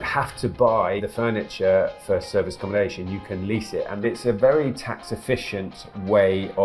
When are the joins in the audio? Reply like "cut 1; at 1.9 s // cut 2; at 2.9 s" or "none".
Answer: cut 1; at 1.0 s // cut 2; at 4.0 s